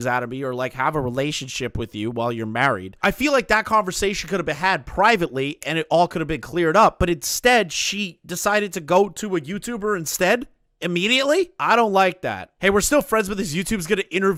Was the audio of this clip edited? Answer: no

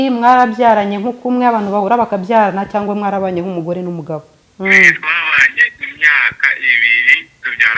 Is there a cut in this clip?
yes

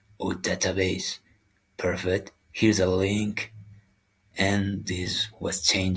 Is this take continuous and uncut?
yes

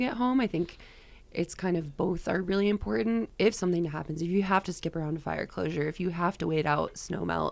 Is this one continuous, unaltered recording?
no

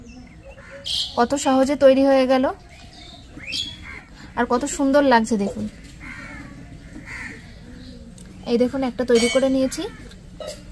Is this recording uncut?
no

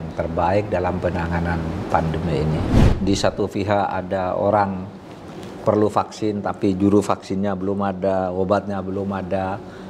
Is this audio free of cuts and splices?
no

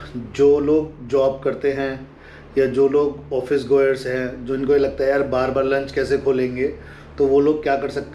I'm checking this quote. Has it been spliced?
no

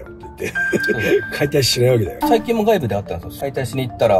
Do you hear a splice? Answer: yes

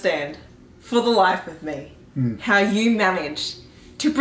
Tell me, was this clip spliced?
no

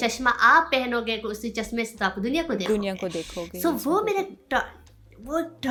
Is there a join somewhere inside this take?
no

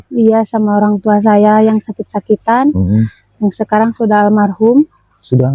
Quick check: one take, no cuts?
yes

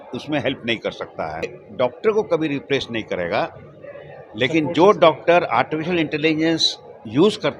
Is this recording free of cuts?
no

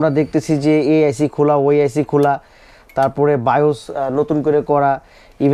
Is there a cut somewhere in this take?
no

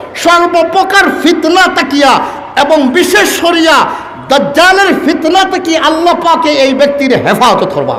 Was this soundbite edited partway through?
no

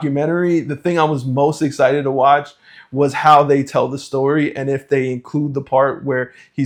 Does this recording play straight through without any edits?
yes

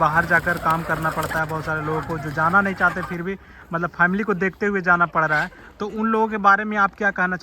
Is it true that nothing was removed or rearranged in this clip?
yes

